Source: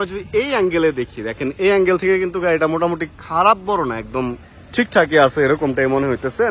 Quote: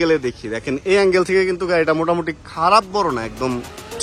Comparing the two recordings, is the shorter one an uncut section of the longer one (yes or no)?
yes